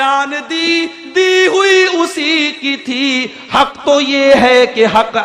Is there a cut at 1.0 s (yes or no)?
no